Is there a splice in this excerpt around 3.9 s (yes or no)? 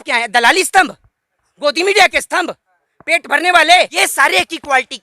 yes